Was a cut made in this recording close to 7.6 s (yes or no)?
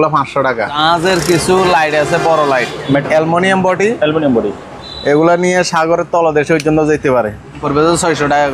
yes